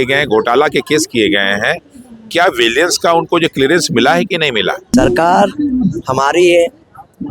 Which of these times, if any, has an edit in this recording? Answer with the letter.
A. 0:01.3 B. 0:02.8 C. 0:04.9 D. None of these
C